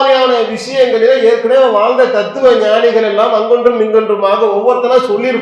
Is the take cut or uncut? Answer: uncut